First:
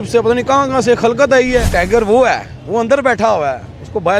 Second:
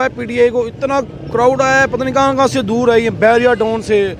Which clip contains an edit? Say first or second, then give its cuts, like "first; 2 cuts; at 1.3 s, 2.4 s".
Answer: first; 1 cut; at 1.7 s